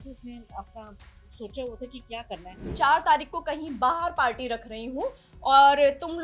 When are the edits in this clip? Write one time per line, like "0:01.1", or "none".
0:02.6